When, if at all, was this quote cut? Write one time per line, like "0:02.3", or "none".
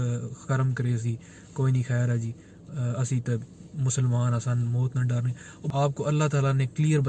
0:05.6

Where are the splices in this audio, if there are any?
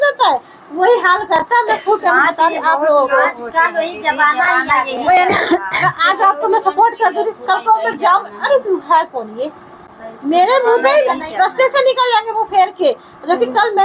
none

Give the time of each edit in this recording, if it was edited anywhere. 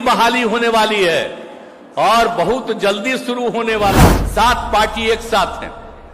0:04.0

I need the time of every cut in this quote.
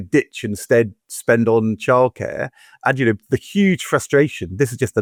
none

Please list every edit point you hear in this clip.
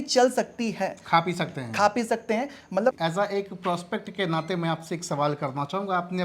0:03.0

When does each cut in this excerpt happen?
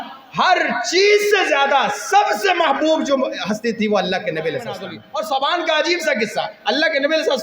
0:05.0

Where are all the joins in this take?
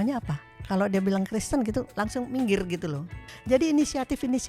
0:03.3

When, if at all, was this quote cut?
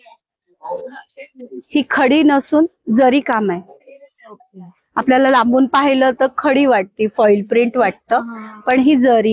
none

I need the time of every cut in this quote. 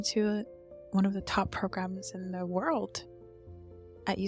none

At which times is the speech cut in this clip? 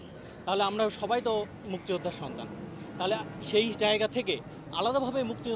none

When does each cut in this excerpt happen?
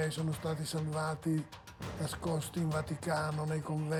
none

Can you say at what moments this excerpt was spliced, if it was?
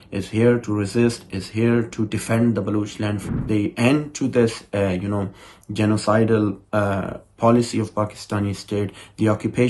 0:03.3

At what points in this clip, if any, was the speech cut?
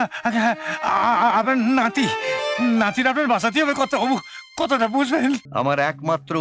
0:05.5

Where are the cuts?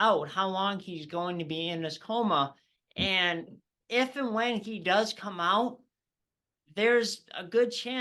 0:03.8

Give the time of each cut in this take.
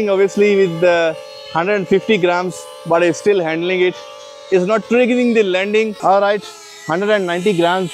0:05.9

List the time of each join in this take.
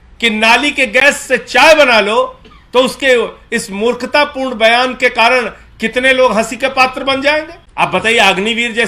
0:07.6

